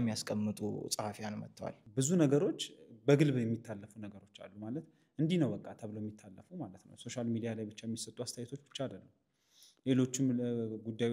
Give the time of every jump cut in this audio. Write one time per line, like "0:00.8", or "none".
0:01.8